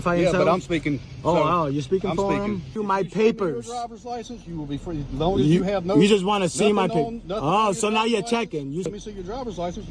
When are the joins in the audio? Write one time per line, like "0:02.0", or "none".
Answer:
0:02.7
0:08.9